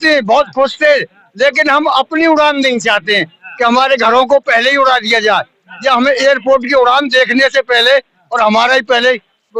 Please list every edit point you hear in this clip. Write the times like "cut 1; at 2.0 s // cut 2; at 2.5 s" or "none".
none